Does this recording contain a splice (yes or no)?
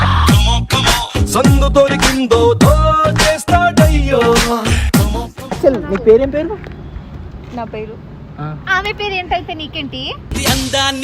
yes